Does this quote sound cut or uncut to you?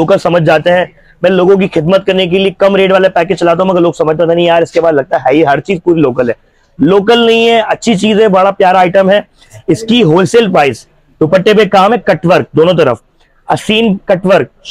uncut